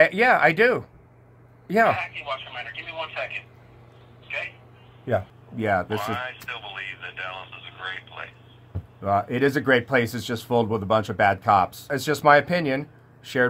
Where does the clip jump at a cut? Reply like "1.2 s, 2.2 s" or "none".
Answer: 5.3 s, 12.0 s